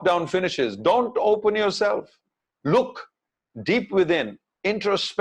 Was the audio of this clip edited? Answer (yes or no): no